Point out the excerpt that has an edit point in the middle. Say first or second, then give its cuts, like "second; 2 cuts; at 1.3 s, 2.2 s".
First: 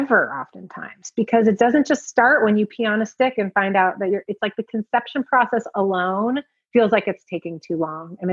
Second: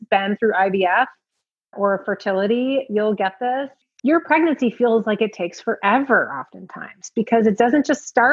second; 1 cut; at 3.9 s